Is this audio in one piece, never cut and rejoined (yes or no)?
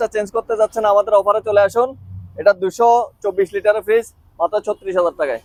yes